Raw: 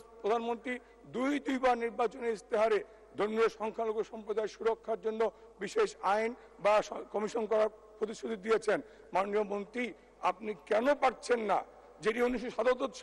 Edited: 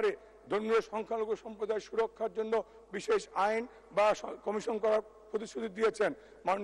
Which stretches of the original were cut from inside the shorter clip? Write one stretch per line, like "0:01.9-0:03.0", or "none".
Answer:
none